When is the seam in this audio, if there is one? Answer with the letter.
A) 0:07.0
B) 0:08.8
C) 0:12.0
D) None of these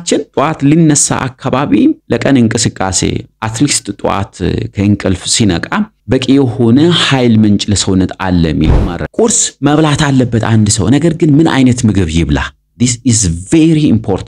B